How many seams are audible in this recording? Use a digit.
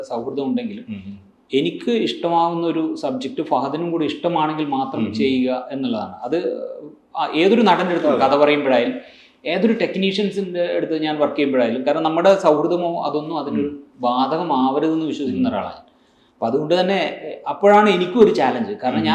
0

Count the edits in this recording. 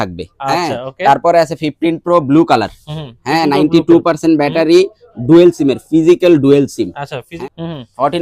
1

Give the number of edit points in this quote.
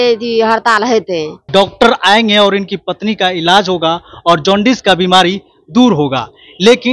1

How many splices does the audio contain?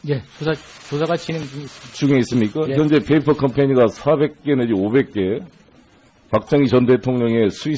0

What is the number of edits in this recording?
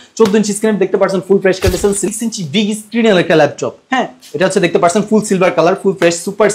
1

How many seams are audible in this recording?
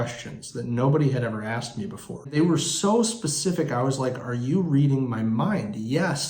1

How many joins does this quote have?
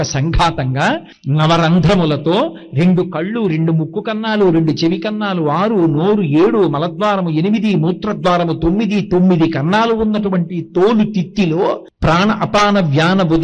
2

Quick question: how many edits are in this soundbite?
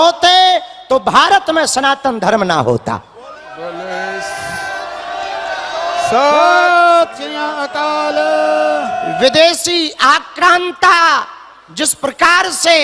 0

